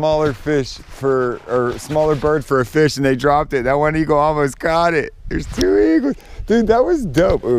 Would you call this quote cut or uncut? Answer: uncut